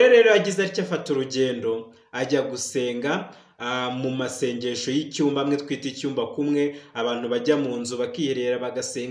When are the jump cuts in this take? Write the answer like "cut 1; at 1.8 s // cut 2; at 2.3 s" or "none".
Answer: none